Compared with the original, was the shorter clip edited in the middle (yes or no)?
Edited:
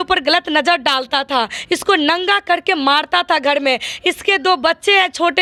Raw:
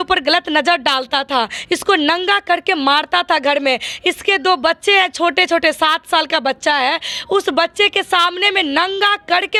no